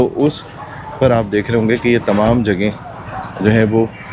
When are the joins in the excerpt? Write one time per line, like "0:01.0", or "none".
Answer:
none